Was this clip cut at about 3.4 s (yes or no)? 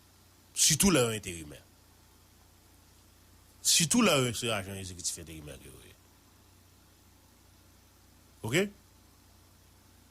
yes